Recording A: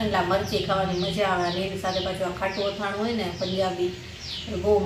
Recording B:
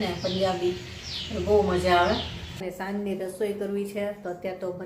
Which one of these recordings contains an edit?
B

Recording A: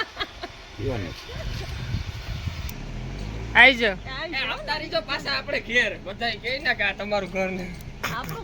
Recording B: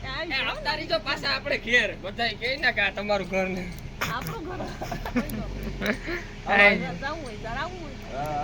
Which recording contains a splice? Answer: A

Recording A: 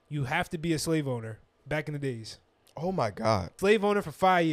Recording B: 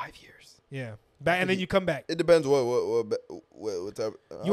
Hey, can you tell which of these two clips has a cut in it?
A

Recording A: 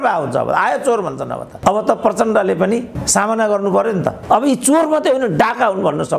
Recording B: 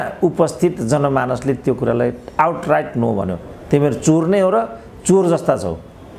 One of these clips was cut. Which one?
A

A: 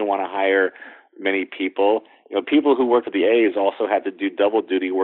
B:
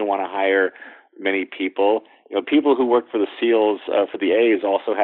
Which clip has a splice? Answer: A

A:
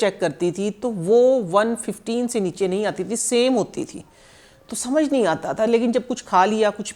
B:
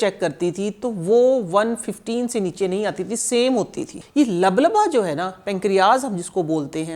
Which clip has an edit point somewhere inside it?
B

